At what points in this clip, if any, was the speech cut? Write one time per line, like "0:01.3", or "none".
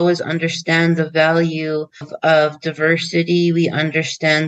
0:02.1